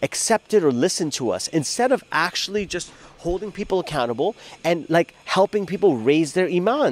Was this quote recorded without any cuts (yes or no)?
yes